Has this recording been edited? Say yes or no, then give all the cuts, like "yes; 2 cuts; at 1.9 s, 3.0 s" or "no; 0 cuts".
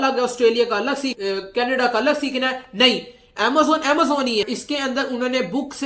yes; 1 cut; at 4.5 s